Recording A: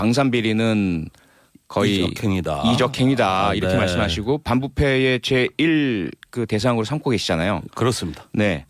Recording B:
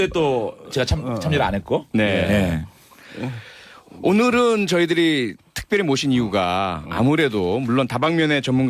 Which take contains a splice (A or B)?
A